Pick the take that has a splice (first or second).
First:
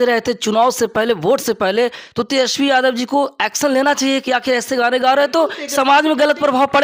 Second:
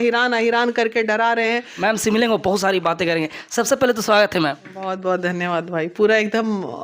second